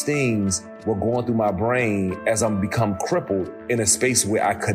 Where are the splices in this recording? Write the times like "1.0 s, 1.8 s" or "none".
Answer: none

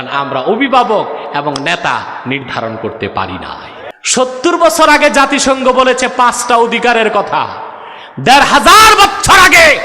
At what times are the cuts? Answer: 3.8 s

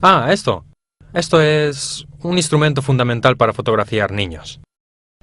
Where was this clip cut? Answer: 3.5 s

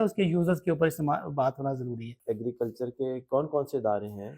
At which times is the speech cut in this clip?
2.1 s

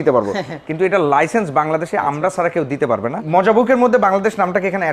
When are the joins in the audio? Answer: 3.2 s

